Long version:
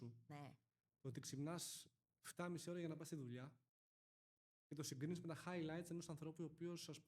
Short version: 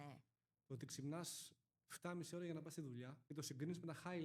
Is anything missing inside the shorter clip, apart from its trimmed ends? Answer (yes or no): yes